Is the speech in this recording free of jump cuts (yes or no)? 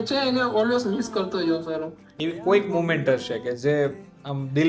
no